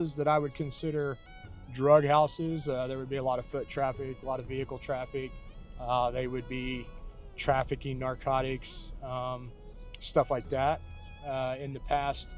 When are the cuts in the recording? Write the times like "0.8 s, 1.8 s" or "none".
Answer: none